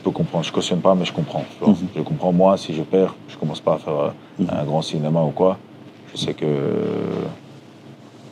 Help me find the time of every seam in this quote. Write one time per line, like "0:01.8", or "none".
none